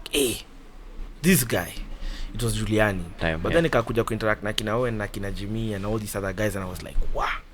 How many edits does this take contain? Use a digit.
1